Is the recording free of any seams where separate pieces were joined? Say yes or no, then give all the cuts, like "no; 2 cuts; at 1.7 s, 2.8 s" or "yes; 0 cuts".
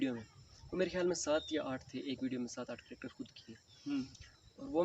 yes; 0 cuts